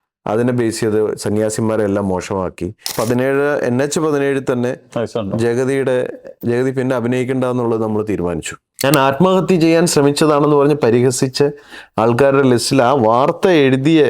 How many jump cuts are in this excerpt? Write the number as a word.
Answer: two